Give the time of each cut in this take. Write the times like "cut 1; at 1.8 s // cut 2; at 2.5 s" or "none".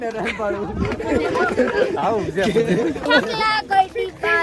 cut 1; at 3.1 s